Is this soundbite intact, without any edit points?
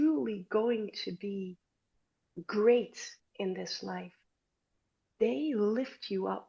yes; 0 cuts

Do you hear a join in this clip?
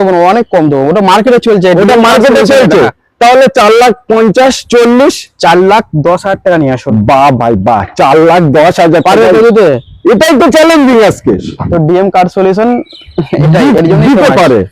no; 0 cuts

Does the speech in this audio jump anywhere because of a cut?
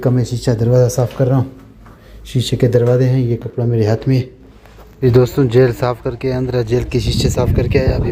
no; 0 cuts

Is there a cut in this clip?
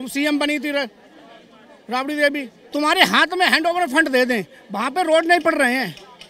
no; 0 cuts

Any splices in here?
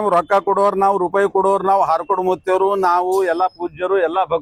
no; 0 cuts

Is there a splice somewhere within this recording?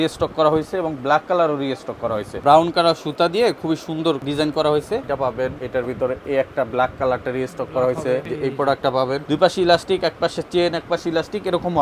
yes; 5 cuts; at 2.4 s, 4.2 s, 5.5 s, 8.3 s, 9.2 s

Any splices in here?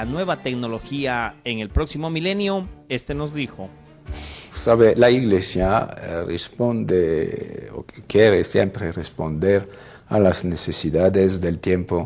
yes; 1 cut; at 5.9 s

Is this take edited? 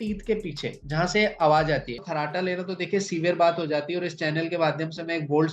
yes; 1 cut; at 2.0 s

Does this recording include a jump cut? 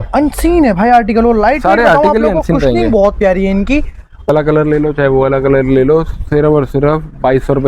yes; 1 cut; at 4.3 s

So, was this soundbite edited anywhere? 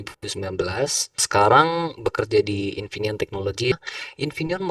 yes; 2 cuts; at 1.2 s, 3.8 s

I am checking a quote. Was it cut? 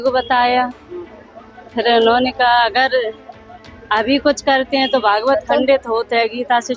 no; 0 cuts

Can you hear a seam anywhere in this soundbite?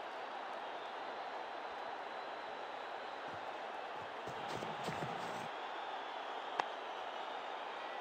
no; 0 cuts

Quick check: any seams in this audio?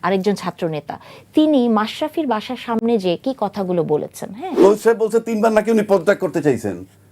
yes; 1 cut; at 4.5 s

